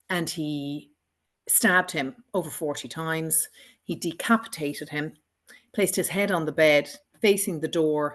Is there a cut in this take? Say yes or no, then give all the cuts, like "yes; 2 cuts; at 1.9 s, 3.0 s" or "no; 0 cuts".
no; 0 cuts